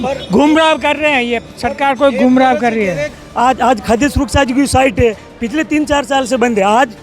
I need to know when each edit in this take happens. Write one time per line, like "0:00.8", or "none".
0:03.2